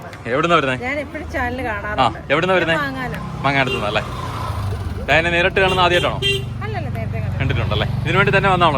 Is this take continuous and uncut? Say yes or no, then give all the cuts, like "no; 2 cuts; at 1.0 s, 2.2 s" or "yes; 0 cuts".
yes; 0 cuts